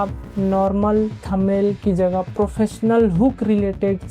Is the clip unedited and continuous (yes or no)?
yes